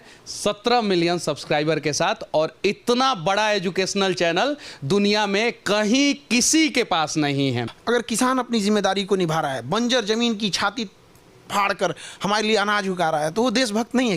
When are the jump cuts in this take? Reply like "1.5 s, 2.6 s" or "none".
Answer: 7.7 s